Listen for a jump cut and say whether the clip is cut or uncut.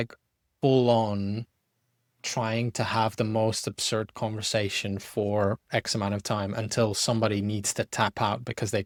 uncut